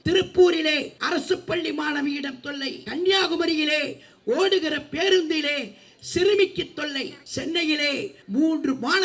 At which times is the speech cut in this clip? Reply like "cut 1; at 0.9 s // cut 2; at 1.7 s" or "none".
cut 1; at 0.9 s // cut 2; at 2.8 s // cut 3; at 7.2 s // cut 4; at 8.2 s

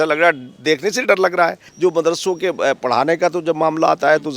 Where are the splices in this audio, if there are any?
cut 1; at 1.6 s

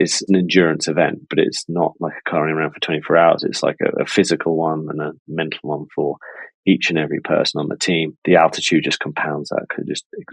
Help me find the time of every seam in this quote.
cut 1; at 8.1 s

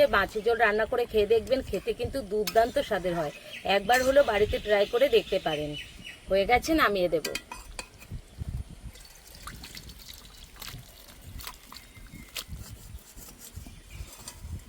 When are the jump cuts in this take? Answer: cut 1; at 8.4 s

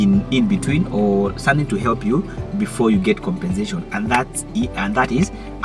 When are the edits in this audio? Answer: none

